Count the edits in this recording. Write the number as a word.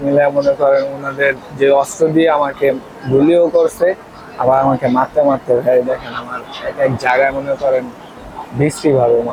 zero